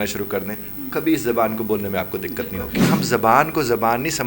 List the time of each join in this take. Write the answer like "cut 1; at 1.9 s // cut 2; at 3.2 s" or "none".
cut 1; at 2.9 s